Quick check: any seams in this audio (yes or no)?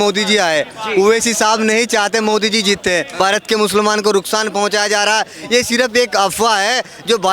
yes